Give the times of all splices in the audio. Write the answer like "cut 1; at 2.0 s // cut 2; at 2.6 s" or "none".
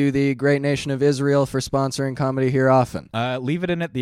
cut 1; at 3.0 s